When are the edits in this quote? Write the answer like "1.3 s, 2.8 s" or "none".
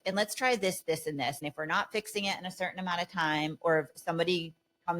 1.5 s